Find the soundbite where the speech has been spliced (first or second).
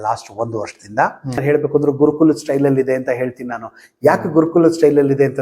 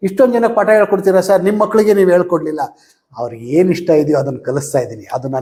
first